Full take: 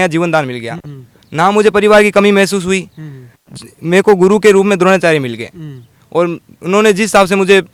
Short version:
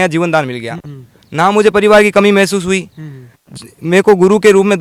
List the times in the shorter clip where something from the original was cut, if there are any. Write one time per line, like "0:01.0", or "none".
none